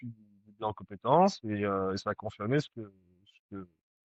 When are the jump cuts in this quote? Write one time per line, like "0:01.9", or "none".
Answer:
none